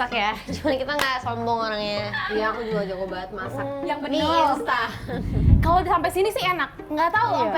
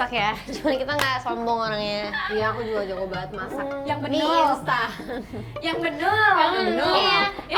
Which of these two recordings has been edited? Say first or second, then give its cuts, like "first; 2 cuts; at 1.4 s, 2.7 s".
first; 1 cut; at 5.5 s